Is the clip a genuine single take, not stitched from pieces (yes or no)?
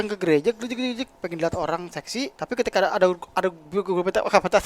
no